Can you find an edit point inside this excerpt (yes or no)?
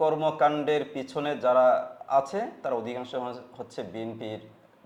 no